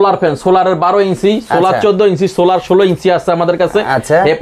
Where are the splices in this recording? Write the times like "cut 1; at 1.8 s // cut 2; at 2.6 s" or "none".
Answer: none